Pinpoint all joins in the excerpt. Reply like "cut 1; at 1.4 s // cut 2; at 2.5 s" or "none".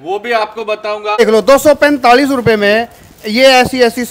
cut 1; at 1.2 s